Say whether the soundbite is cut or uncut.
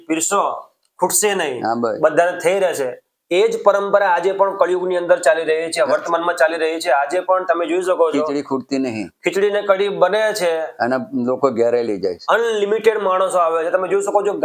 uncut